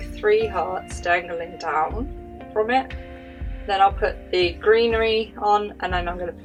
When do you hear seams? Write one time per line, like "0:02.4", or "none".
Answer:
none